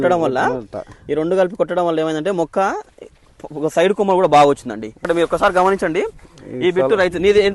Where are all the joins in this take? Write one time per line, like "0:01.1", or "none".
0:05.0